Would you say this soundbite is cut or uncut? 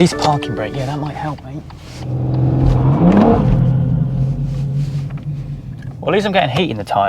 cut